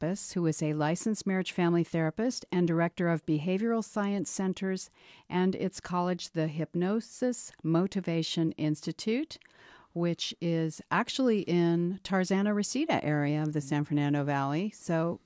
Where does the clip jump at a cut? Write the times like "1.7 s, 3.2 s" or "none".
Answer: 14.2 s